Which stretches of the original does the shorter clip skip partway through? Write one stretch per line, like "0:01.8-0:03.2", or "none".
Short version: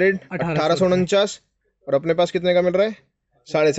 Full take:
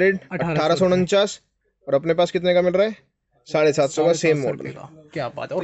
none

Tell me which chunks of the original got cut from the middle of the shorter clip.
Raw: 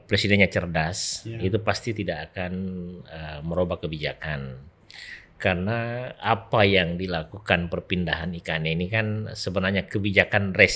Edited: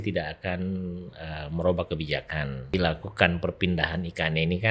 0:04.6-0:07.0

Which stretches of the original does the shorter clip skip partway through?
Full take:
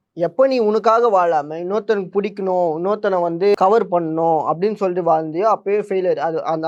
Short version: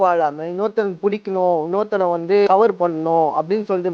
none

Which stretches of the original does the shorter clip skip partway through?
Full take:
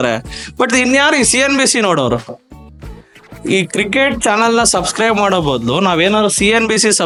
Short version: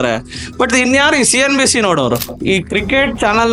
0:02.3-0:03.3

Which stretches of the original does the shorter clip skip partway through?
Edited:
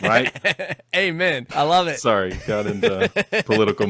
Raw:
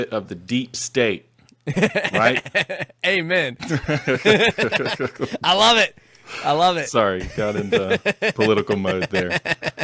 0:03.5-0:06.3

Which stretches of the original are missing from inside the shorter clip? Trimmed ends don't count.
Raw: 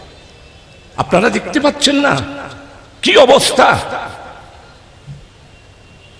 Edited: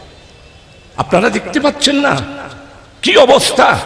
none

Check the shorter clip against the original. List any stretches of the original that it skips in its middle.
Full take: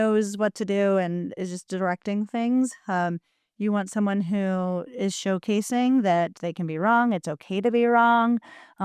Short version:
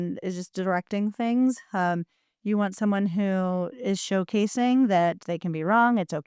none

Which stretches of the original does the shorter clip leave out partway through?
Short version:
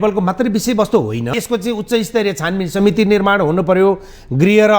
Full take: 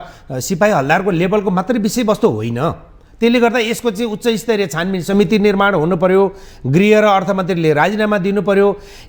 0:02.6-0:03.7

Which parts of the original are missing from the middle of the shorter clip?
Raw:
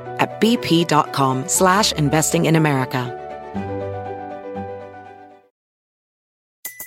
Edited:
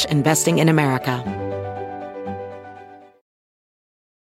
0:03.1-0:03.5

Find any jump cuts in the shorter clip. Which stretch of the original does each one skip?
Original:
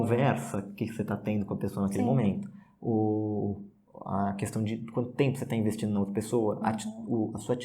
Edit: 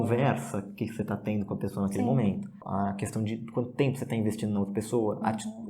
0:02.5-0:03.9

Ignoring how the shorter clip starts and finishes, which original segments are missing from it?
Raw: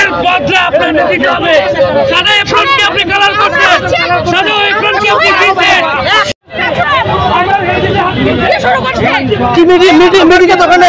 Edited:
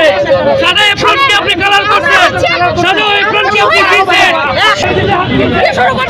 0:06.3-0:07.7

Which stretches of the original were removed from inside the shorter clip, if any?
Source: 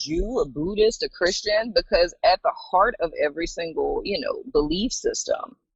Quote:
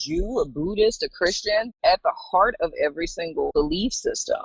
0:01.7-0:02.1
0:03.9-0:04.5

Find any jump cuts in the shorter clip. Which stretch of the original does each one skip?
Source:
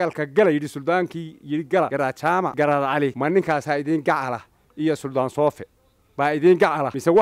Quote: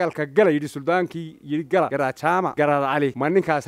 none

